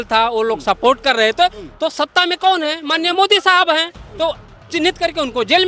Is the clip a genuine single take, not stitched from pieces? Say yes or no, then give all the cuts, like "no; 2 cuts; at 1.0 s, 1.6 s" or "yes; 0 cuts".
yes; 0 cuts